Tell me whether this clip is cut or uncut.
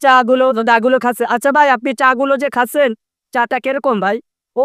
uncut